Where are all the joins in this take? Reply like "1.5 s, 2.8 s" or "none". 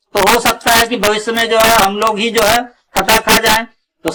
none